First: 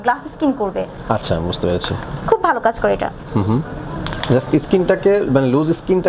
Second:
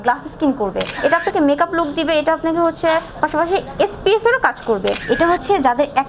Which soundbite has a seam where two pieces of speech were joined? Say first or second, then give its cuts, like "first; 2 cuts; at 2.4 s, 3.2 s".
second; 2 cuts; at 0.9 s, 5.0 s